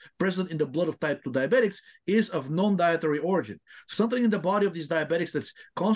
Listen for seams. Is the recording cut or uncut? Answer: cut